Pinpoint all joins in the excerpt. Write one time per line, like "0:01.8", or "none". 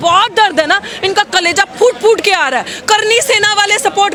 none